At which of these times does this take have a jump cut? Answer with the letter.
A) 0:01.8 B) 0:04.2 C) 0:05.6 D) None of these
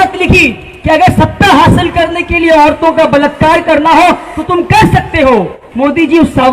C